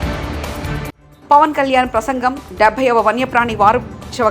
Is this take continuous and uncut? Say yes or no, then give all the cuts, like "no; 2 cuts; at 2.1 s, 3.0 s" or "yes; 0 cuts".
no; 1 cut; at 1.0 s